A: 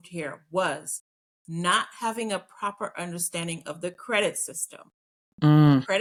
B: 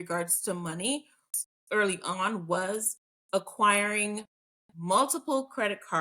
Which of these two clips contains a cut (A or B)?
B